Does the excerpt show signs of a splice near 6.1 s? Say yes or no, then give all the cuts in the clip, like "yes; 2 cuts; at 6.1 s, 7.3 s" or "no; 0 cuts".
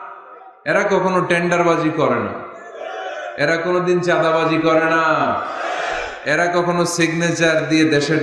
no; 0 cuts